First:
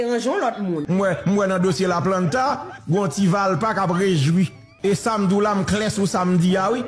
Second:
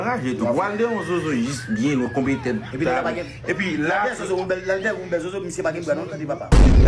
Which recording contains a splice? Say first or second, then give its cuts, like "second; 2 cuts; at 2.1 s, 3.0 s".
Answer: first; 2 cuts; at 0.8 s, 4.6 s